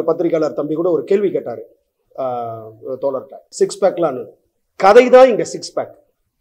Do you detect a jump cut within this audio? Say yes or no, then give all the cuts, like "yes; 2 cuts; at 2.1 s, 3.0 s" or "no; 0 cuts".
yes; 1 cut; at 3.4 s